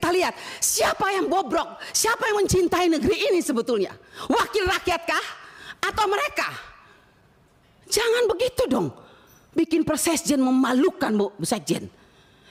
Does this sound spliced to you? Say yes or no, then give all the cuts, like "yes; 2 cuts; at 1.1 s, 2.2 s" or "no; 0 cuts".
no; 0 cuts